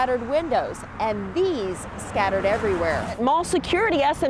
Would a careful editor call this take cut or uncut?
cut